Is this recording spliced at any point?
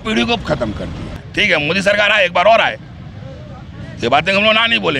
yes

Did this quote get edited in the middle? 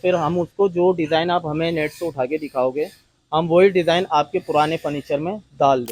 no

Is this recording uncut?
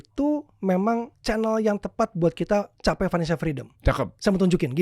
no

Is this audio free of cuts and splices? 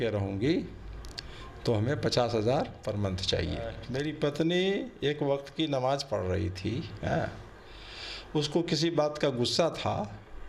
no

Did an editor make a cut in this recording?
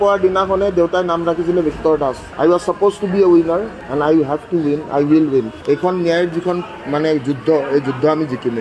no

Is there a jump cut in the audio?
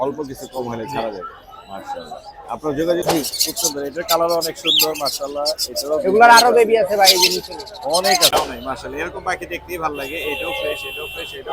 yes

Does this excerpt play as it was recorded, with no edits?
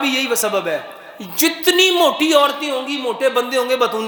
yes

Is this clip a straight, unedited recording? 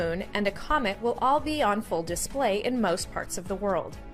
no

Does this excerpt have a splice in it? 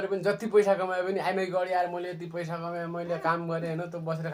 no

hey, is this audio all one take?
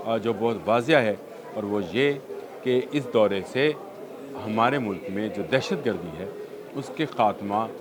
yes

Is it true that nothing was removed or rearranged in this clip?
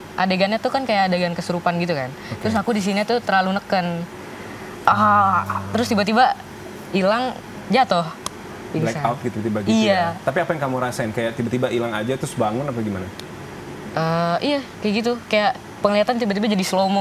yes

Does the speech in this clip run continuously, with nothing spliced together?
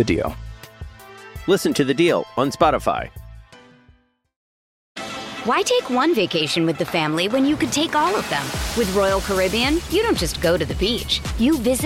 no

